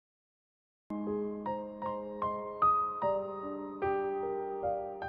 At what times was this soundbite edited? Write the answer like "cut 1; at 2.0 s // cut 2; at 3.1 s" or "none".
cut 1; at 1.7 s

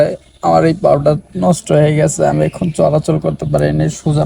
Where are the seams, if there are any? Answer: none

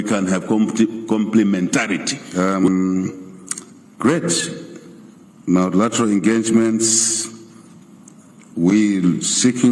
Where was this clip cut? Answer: cut 1; at 2.2 s

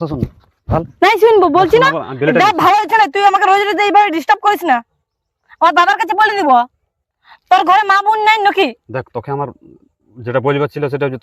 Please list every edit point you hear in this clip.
none

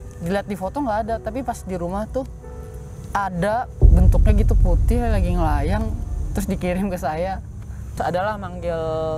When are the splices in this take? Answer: cut 1; at 7.9 s

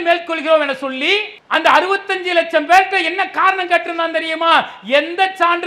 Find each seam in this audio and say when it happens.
cut 1; at 1.3 s

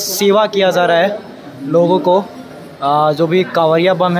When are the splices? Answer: none

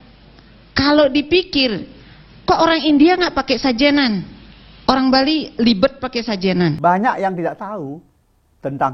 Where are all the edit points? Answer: cut 1; at 6.8 s

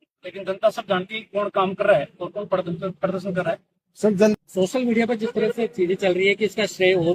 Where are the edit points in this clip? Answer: cut 1; at 4.3 s

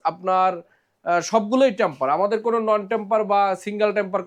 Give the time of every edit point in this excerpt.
none

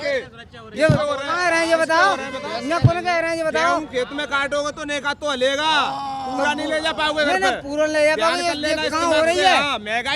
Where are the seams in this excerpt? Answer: none

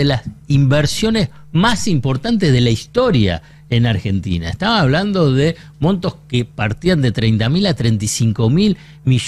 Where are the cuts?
none

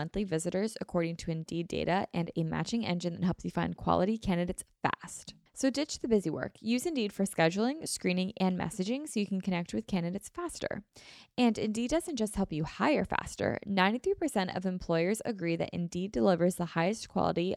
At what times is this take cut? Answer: none

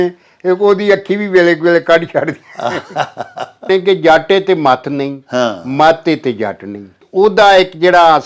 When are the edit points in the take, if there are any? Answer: cut 1; at 3.7 s // cut 2; at 7.0 s

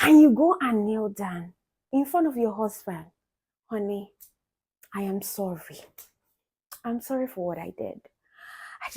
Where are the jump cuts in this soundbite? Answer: cut 1; at 1.9 s

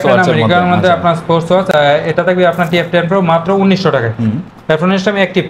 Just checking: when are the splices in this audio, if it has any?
none

